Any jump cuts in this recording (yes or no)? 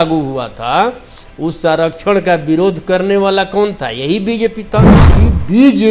yes